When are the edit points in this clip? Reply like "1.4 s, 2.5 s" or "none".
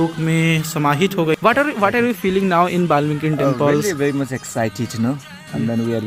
1.4 s